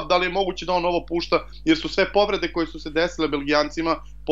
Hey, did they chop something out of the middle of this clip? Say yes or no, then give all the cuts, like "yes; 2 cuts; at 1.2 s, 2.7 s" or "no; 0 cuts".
no; 0 cuts